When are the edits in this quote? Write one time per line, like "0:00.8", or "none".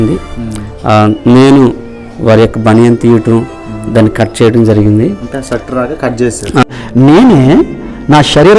0:06.6